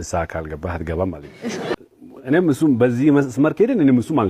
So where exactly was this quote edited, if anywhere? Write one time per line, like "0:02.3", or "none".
0:01.7